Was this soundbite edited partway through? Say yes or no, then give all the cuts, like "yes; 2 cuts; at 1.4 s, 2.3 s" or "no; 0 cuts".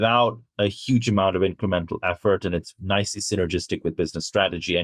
no; 0 cuts